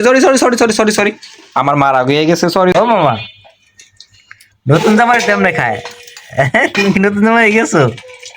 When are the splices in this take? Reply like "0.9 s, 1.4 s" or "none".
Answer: 2.7 s